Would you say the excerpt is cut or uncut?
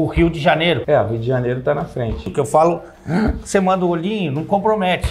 cut